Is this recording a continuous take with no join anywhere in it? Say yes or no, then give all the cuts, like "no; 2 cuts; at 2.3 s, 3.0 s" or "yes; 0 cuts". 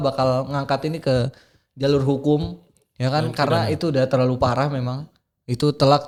yes; 0 cuts